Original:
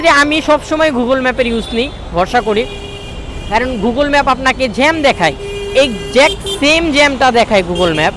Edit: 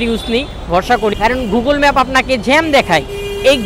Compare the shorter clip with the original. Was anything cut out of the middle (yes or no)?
yes